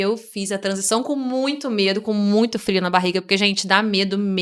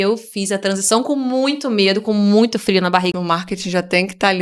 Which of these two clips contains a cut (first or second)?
second